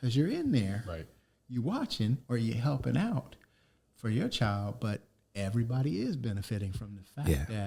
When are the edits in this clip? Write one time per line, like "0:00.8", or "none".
none